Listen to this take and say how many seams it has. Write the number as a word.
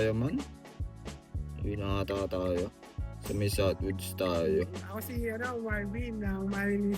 one